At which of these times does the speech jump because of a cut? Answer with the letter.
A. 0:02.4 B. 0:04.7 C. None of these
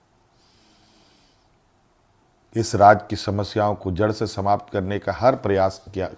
C